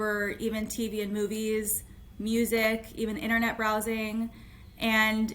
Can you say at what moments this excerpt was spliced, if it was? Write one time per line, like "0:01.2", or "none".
none